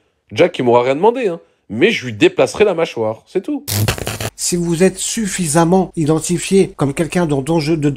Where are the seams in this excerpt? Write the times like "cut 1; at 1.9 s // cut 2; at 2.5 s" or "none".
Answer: cut 1; at 4.0 s // cut 2; at 5.9 s // cut 3; at 6.7 s